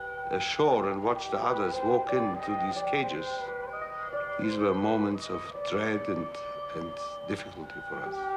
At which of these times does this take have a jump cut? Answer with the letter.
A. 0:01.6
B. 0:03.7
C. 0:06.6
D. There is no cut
A